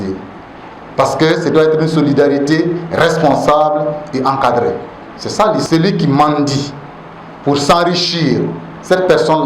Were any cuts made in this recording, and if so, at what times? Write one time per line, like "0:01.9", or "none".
0:05.7